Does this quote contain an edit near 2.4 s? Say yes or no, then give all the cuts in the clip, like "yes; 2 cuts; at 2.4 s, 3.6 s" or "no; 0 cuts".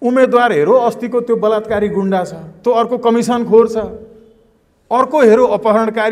yes; 1 cut; at 2.4 s